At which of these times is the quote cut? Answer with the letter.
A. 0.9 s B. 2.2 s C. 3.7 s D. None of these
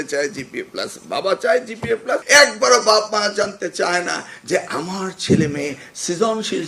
B